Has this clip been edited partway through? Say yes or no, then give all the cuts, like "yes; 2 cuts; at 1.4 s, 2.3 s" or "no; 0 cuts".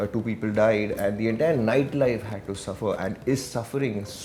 no; 0 cuts